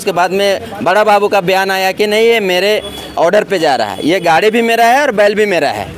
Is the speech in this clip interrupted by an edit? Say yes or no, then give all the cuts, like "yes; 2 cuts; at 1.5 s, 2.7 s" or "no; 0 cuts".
no; 0 cuts